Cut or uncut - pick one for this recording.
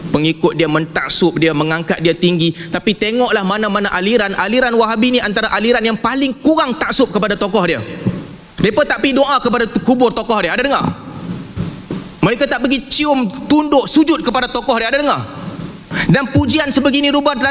uncut